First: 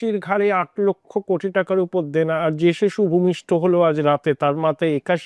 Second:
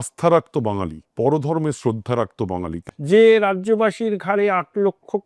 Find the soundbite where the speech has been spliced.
second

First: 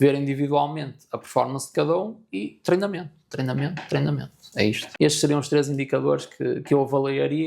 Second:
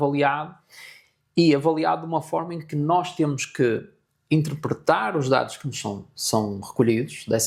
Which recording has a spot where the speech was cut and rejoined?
first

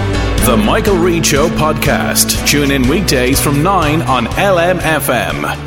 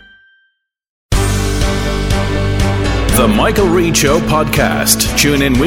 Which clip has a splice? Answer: second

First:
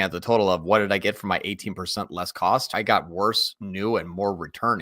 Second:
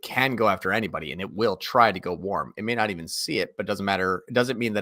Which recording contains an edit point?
first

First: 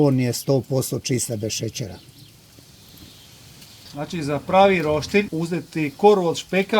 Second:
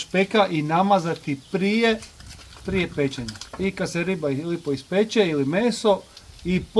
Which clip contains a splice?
first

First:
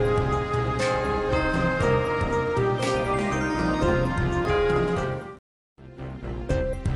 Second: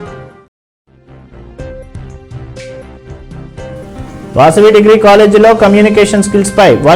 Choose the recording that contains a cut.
second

